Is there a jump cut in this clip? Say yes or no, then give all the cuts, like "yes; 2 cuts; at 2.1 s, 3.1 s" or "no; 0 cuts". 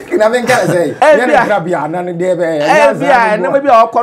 yes; 1 cut; at 0.9 s